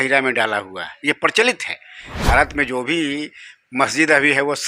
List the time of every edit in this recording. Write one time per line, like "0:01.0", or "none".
0:02.1